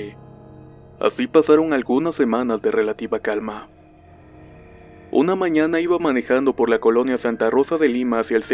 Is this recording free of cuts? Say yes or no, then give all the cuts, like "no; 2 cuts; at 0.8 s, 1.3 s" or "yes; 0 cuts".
no; 1 cut; at 3.9 s